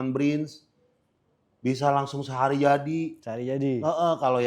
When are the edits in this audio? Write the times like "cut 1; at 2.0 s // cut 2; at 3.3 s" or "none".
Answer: none